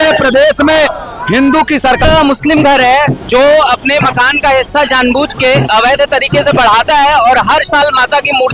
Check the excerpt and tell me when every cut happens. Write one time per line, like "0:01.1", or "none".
0:02.1